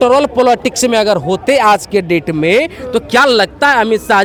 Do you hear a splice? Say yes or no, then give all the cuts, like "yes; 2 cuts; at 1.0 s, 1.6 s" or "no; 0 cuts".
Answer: no; 0 cuts